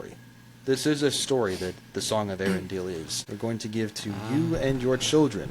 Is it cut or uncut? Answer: cut